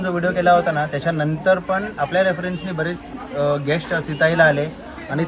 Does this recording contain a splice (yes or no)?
no